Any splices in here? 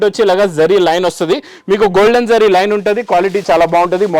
no; 0 cuts

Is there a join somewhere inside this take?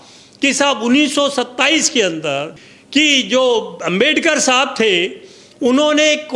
yes; 1 cut; at 2.6 s

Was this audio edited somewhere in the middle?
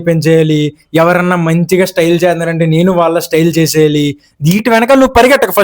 yes; 1 cut; at 4.6 s

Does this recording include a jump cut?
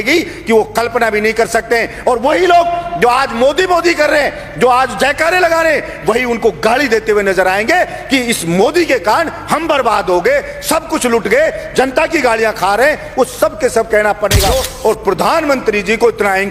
yes; 1 cut; at 14.7 s

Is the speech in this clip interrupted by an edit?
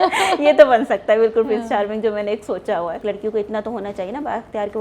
yes; 1 cut; at 3.0 s

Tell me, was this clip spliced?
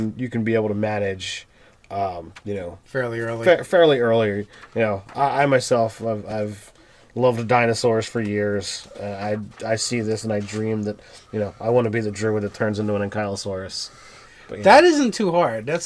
no; 0 cuts

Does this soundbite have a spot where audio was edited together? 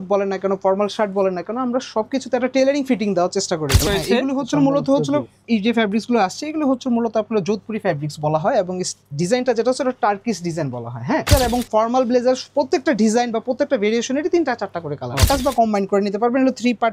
yes; 3 cuts; at 3.8 s, 11.3 s, 15.3 s

